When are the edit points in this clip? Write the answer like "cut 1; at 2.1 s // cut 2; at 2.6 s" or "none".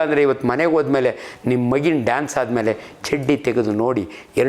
none